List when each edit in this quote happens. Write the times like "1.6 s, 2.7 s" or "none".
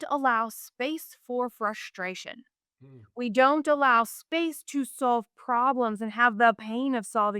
none